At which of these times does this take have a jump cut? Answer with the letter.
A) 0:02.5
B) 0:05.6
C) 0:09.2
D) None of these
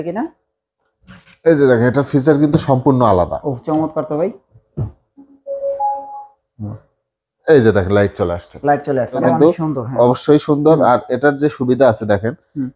C